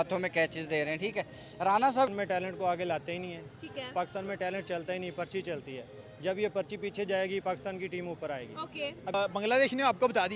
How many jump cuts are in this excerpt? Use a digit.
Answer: 2